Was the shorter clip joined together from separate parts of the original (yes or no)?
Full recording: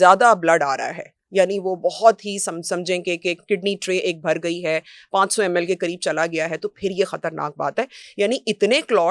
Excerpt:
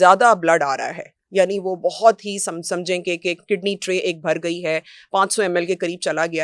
no